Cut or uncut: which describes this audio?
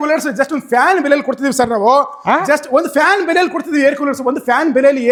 uncut